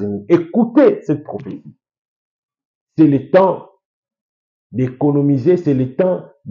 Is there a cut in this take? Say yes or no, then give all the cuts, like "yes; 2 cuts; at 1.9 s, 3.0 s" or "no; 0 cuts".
no; 0 cuts